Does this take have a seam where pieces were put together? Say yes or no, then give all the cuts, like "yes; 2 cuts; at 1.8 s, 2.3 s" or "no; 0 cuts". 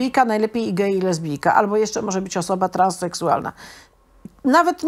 no; 0 cuts